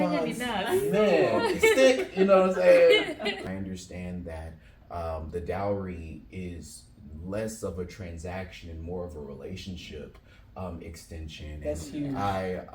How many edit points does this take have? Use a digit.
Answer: 1